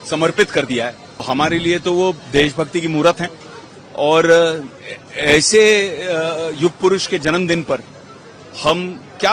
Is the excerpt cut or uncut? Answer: cut